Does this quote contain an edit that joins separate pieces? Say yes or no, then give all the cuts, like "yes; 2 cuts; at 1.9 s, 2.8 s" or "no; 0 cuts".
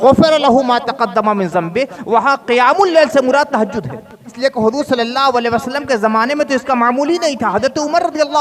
yes; 1 cut; at 4.3 s